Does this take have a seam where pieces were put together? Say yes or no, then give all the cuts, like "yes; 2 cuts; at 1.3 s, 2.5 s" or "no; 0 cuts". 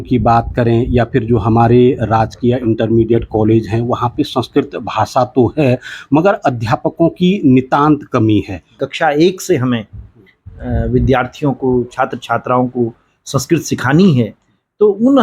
yes; 1 cut; at 8.8 s